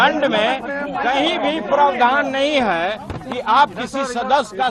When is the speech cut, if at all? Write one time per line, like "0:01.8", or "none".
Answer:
none